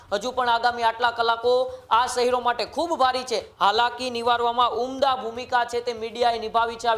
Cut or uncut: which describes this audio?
cut